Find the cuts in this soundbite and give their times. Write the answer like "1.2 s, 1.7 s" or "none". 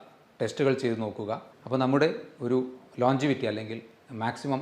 1.5 s

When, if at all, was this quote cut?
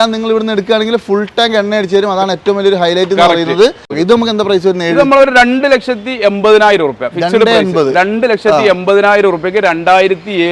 3.9 s

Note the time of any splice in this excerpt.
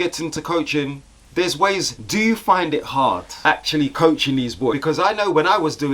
1.9 s, 3.3 s, 4.8 s

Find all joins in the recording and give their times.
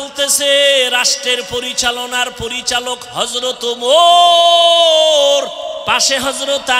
5.8 s

